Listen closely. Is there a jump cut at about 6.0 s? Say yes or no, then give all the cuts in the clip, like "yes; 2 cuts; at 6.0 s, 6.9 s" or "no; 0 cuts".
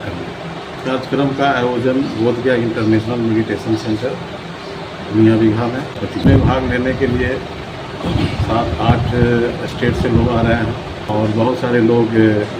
yes; 3 cuts; at 0.8 s, 6.0 s, 11.0 s